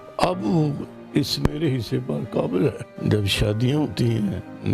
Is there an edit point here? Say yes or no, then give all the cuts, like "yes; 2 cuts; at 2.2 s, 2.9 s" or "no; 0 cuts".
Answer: yes; 2 cuts; at 0.9 s, 2.9 s